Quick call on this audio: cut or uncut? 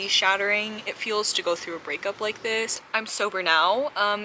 cut